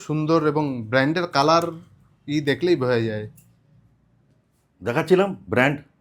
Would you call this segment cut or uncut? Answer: uncut